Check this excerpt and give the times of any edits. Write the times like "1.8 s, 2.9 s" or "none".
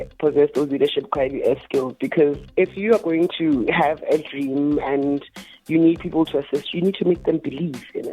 2.4 s